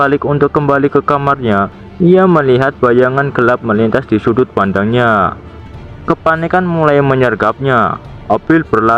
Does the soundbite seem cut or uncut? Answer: uncut